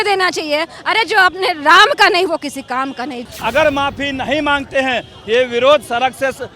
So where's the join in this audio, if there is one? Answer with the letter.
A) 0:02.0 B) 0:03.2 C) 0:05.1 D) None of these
B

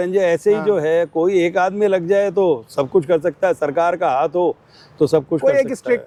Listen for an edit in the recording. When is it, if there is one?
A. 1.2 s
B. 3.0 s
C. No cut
C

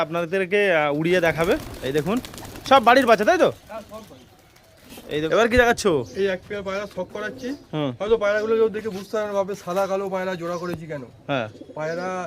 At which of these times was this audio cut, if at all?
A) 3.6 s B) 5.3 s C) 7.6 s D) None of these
B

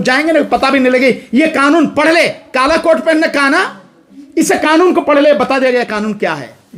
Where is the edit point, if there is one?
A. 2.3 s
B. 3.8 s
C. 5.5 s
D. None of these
D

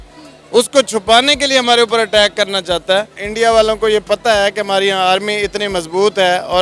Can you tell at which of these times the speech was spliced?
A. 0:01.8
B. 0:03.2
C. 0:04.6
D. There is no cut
B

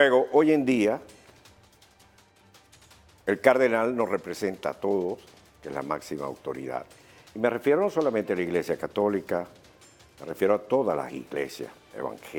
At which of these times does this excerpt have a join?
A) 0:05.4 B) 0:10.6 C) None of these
C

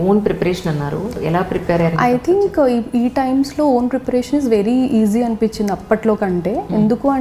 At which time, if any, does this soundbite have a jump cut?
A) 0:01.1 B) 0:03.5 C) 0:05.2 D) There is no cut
A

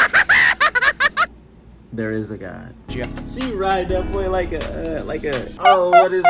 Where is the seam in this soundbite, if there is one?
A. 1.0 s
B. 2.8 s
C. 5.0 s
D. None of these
B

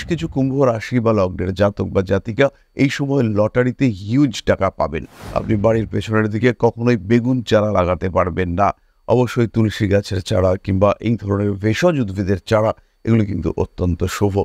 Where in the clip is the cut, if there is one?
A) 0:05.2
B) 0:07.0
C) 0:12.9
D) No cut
A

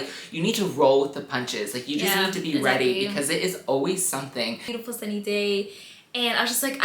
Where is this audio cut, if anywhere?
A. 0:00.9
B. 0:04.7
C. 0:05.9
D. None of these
B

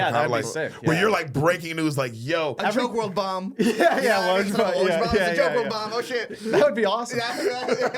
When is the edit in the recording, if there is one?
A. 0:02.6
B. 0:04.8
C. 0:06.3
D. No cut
A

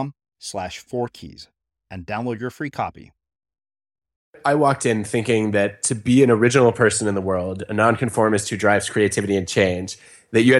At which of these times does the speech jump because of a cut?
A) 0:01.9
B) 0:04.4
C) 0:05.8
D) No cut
B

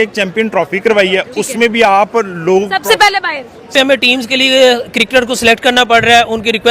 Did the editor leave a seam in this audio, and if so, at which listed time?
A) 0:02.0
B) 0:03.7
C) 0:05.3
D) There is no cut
B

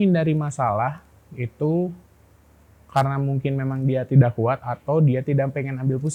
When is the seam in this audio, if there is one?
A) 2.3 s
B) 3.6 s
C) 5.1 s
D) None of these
D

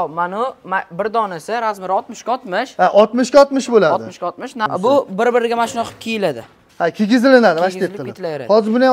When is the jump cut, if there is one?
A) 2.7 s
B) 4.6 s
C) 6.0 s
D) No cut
B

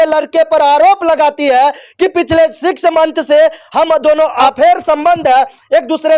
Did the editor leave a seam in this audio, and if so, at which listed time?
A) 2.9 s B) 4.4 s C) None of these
B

